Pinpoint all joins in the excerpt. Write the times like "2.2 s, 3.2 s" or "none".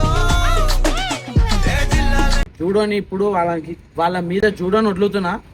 none